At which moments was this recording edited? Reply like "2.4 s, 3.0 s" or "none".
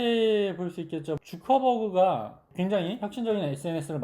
1.1 s, 2.4 s